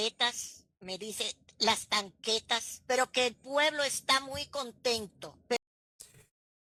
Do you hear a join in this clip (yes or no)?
no